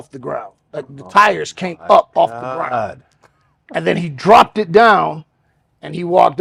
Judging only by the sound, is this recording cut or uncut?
uncut